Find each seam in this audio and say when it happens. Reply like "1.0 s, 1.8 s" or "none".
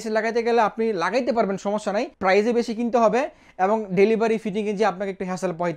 2.1 s